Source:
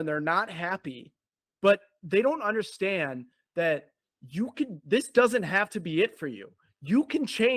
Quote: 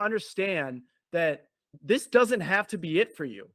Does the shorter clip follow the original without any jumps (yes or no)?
no